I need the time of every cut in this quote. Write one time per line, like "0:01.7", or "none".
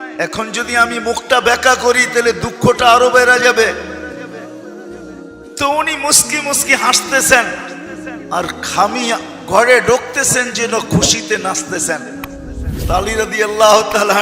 0:03.9
0:05.6